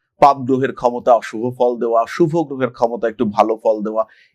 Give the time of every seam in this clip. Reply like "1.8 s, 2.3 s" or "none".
none